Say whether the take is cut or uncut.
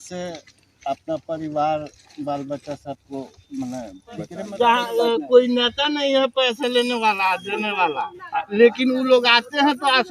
cut